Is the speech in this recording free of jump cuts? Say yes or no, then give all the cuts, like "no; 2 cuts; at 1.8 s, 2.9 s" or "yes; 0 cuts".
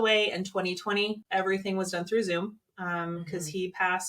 no; 1 cut; at 1.2 s